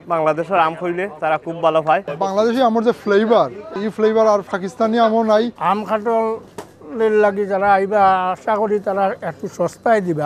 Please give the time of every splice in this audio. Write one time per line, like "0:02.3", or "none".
0:02.1
0:03.7
0:05.5